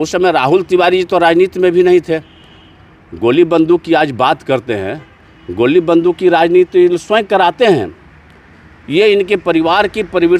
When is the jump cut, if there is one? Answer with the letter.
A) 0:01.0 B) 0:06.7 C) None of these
C